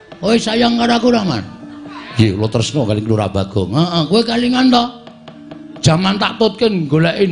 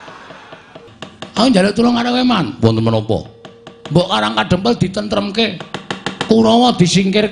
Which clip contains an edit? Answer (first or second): second